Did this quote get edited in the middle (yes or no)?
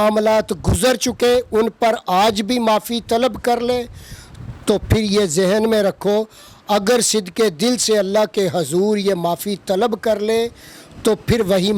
no